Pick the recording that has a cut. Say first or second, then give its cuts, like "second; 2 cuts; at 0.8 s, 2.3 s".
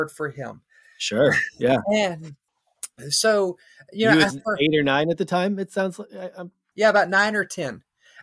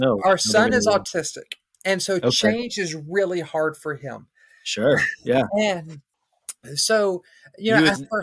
first; 1 cut; at 6.6 s